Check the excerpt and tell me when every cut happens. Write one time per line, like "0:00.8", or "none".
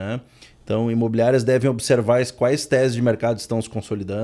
none